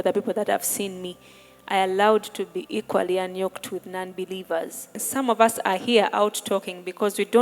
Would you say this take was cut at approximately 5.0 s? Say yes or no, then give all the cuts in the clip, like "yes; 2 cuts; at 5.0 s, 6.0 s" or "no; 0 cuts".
yes; 1 cut; at 5.0 s